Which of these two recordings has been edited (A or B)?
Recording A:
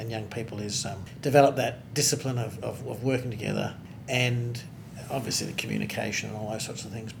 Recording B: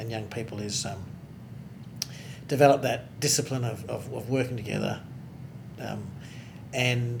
A